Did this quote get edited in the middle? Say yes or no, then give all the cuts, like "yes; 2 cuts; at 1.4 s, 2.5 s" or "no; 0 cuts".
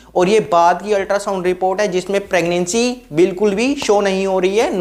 no; 0 cuts